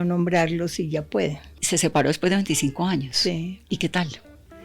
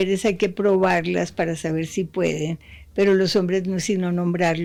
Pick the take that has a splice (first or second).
first